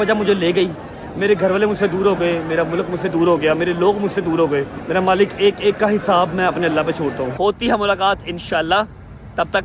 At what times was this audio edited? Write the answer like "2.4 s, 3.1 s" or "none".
4.8 s, 7.3 s